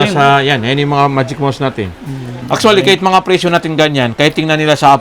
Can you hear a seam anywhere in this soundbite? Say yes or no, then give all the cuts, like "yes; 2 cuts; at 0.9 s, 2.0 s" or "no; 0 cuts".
yes; 1 cut; at 2.3 s